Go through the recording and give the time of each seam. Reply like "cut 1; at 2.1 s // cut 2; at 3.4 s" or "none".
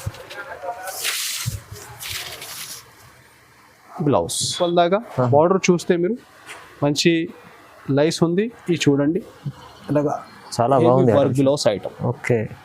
cut 1; at 4.6 s